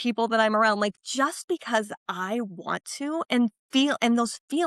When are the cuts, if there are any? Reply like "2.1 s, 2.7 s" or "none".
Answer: none